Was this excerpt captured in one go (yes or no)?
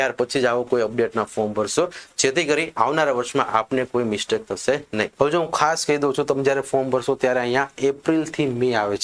no